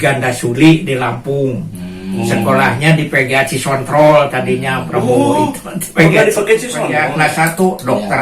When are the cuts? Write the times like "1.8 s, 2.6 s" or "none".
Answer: 6.9 s